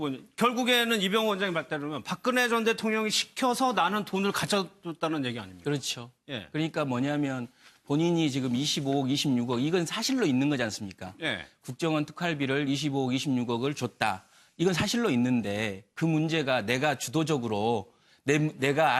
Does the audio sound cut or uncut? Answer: cut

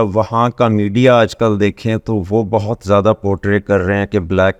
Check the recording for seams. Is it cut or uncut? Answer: uncut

